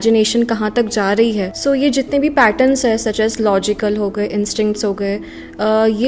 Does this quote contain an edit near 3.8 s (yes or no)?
no